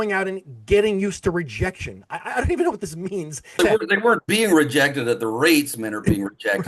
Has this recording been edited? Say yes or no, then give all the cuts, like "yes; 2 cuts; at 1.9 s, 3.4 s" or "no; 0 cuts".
yes; 1 cut; at 3.6 s